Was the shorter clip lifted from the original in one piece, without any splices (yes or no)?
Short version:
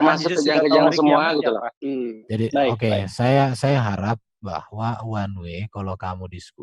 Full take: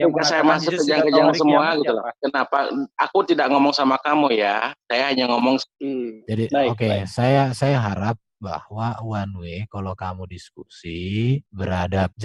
no